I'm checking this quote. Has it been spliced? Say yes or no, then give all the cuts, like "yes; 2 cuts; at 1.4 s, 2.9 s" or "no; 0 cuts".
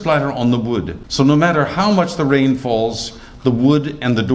yes; 1 cut; at 1.0 s